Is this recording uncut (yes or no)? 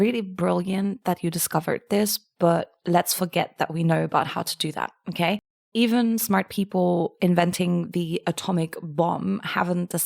no